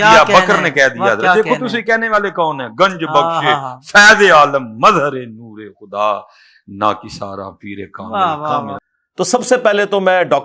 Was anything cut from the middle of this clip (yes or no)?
no